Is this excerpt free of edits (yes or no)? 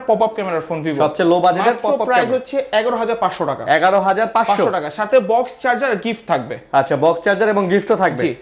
yes